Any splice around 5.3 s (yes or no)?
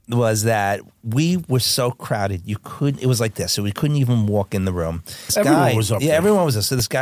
yes